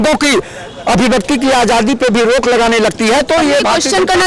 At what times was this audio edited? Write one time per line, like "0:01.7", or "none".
none